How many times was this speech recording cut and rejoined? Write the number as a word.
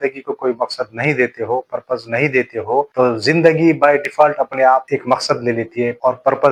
zero